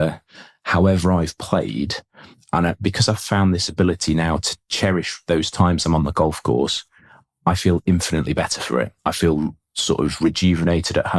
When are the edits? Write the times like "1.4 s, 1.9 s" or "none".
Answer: 4.6 s

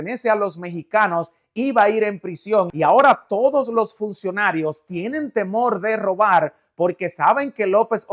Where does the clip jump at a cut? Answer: 2.7 s

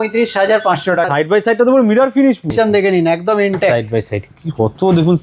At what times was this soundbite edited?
1.1 s, 2.5 s

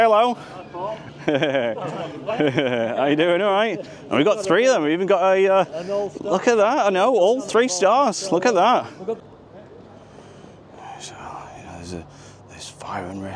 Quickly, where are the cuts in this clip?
9.2 s

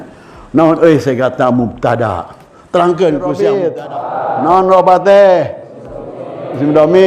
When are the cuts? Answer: 3.3 s

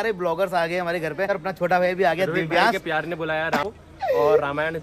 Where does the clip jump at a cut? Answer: 1.3 s, 3.6 s

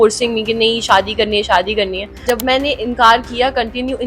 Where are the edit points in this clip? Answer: 2.2 s

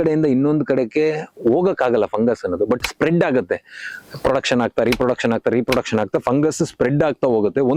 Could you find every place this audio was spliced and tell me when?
none

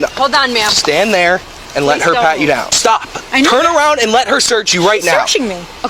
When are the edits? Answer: 2.7 s

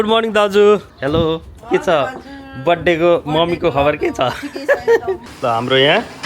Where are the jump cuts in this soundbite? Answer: 0.9 s, 5.3 s

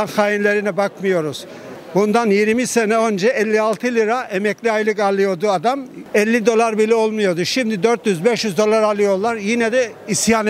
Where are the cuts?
none

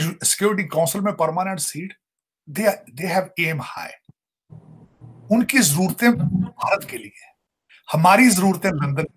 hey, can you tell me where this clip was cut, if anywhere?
none

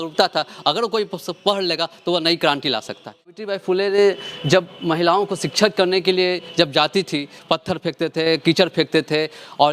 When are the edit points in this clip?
3.3 s, 7.3 s

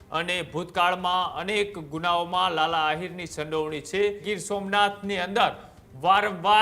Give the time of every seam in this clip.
4.2 s

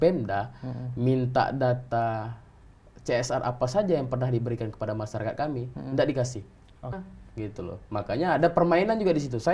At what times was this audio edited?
7.0 s

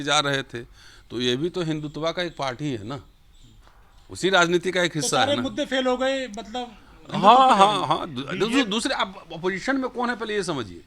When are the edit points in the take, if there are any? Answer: none

